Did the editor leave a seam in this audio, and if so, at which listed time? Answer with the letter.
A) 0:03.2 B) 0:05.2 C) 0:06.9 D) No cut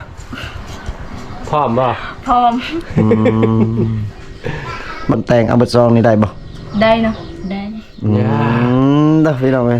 B